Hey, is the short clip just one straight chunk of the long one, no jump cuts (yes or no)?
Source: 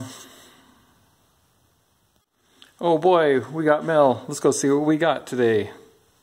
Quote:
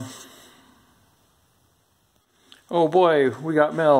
no